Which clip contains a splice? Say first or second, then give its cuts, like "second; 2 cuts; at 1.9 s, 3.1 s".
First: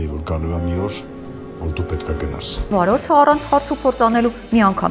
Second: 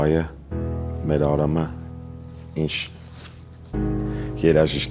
first; 1 cut; at 2.7 s